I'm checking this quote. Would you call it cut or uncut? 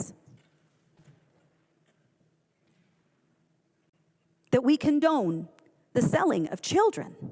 uncut